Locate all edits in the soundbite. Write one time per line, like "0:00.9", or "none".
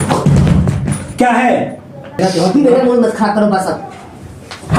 0:02.1